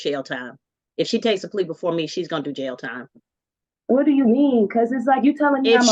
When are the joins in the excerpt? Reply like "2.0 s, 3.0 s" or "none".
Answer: none